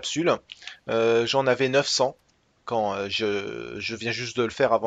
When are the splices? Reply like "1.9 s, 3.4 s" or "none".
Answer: 2.5 s